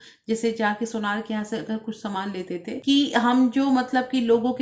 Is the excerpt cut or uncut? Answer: cut